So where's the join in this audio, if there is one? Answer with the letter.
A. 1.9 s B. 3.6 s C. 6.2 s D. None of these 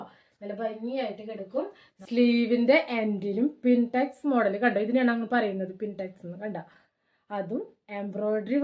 A